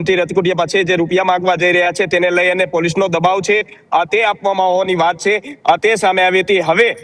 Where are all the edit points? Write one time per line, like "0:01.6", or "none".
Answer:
none